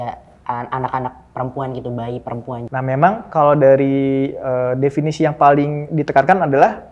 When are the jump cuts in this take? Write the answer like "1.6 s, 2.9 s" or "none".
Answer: 2.6 s